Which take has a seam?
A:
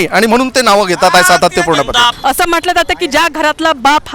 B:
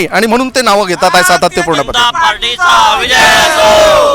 A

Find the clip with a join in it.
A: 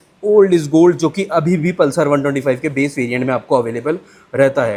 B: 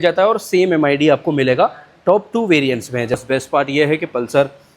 B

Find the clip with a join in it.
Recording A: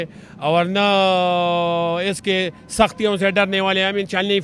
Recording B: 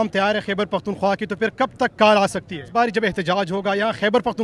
B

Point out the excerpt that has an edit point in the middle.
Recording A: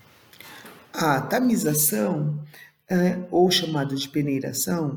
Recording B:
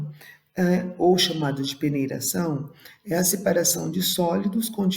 B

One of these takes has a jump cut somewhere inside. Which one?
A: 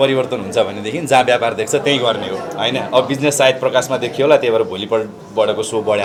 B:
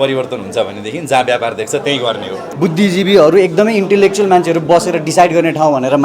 B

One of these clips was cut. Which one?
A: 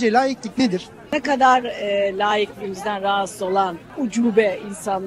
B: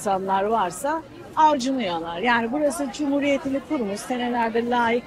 A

